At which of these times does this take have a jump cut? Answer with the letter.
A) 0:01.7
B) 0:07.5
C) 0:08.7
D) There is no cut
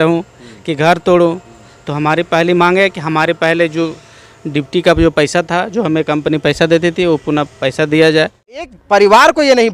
C